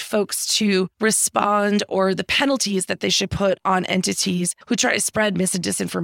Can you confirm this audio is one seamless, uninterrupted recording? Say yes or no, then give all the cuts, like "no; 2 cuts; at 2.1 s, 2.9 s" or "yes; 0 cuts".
no; 2 cuts; at 0.9 s, 4.6 s